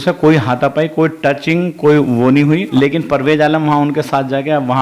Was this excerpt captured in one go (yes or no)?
no